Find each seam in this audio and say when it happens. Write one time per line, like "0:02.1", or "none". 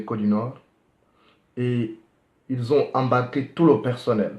0:03.3